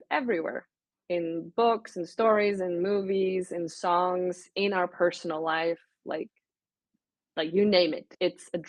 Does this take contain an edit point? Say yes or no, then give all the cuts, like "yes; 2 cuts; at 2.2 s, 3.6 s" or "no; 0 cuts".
no; 0 cuts